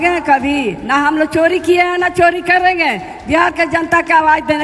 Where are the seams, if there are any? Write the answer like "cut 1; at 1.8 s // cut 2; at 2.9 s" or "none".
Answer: none